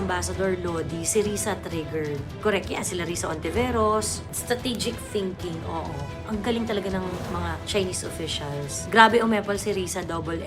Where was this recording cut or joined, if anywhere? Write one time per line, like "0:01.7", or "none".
0:04.3
0:06.2
0:07.6